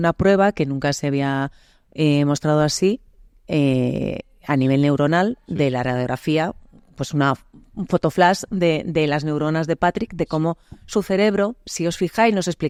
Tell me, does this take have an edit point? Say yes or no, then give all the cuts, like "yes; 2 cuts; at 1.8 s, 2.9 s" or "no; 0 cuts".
no; 0 cuts